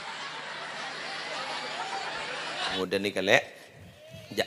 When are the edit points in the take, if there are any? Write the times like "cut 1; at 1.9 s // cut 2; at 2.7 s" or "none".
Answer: cut 1; at 2.7 s